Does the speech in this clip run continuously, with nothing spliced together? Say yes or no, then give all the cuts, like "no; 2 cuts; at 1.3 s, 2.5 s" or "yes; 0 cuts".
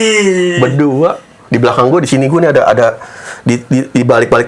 yes; 0 cuts